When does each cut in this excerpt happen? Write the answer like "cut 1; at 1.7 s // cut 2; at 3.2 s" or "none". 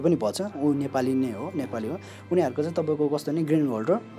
none

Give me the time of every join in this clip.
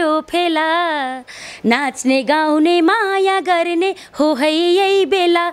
none

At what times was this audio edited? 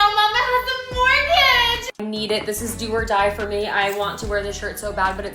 cut 1; at 2.0 s

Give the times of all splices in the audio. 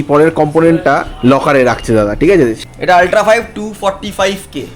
cut 1; at 2.5 s

